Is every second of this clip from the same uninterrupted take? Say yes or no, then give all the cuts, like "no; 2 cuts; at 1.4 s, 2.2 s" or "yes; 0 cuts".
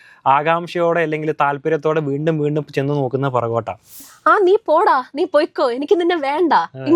no; 1 cut; at 4.0 s